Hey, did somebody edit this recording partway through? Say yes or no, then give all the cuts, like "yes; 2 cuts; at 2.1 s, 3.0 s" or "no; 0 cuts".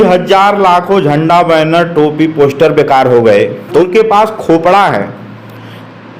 yes; 1 cut; at 3.9 s